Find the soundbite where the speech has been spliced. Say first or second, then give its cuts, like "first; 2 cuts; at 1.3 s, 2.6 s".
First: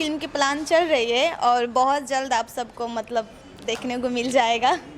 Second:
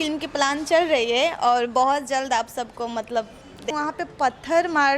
second; 1 cut; at 3.7 s